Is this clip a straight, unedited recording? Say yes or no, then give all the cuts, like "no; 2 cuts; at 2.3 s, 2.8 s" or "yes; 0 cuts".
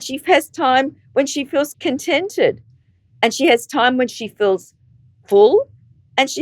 no; 1 cut; at 1.7 s